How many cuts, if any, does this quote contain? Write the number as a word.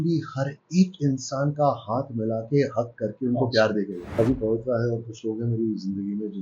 one